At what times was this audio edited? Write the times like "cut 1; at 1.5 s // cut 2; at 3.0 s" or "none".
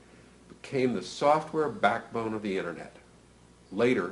none